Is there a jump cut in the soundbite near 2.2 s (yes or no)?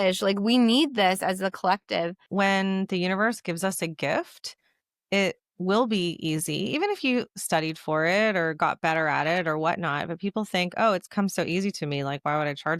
yes